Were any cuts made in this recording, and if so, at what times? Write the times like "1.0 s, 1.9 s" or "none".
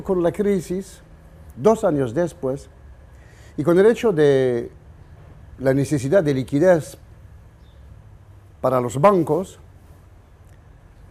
7.8 s